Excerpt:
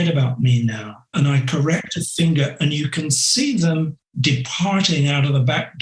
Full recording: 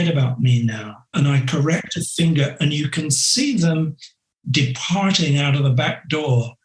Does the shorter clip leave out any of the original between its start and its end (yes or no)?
yes